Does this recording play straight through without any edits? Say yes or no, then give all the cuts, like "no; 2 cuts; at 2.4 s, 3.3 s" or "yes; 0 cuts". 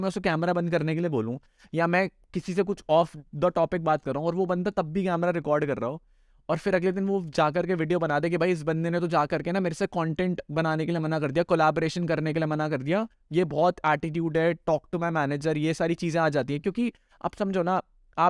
yes; 0 cuts